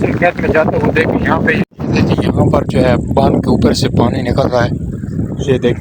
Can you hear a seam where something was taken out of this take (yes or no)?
yes